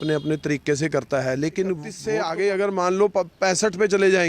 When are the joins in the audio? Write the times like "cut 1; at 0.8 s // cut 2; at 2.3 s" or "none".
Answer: cut 1; at 1.9 s